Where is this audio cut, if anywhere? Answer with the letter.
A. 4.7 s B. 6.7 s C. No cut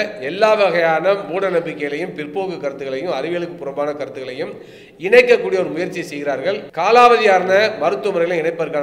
B